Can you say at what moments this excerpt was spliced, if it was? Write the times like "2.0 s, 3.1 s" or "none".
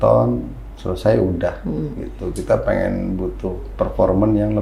none